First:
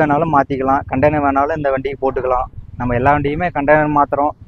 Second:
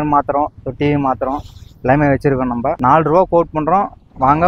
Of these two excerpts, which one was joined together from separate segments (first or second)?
second